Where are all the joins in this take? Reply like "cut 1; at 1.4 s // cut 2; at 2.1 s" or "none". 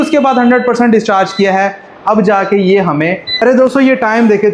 cut 1; at 3.3 s